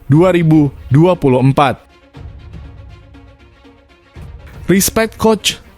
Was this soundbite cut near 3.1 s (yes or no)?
no